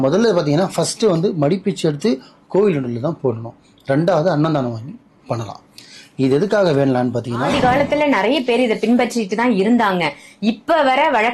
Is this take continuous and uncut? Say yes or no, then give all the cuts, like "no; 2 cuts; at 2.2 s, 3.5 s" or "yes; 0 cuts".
no; 1 cut; at 7.5 s